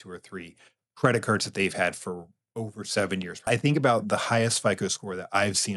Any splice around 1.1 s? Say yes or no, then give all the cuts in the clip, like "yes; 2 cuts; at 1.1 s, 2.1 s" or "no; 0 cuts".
no; 1 cut; at 3.5 s